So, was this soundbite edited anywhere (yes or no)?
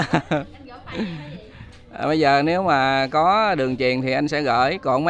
no